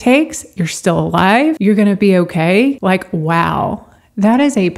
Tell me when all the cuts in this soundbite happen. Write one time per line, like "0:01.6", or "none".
0:01.6
0:02.8